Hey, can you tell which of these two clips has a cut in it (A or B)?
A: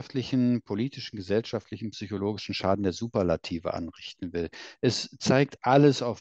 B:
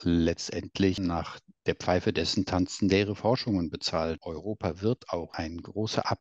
B